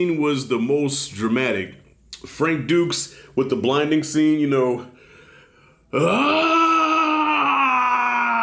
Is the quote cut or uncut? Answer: uncut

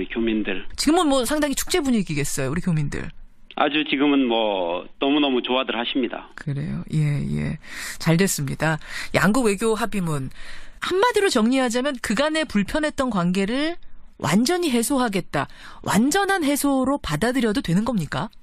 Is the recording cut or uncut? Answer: uncut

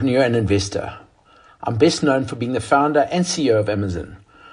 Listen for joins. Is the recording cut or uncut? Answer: uncut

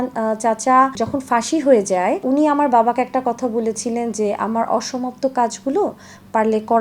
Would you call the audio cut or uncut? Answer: cut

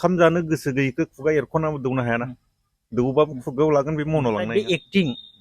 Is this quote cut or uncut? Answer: cut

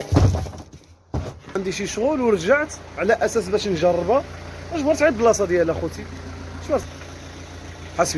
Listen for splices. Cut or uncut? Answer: cut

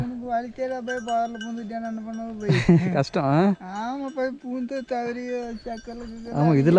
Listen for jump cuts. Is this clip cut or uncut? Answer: uncut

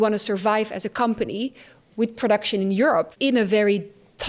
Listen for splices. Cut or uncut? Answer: cut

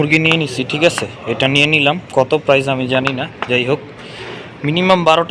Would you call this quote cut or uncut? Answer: uncut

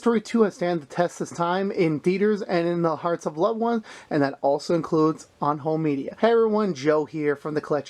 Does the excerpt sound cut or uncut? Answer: cut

